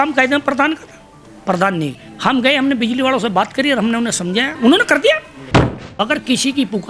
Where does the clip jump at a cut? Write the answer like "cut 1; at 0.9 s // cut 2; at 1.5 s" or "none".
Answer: cut 1; at 2.0 s // cut 2; at 4.5 s // cut 3; at 5.8 s